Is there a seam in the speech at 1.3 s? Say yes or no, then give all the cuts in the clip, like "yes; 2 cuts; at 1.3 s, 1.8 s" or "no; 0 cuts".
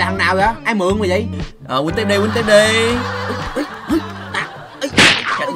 yes; 2 cuts; at 1.3 s, 4.5 s